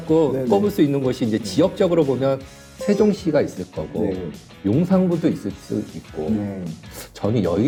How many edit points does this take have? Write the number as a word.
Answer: zero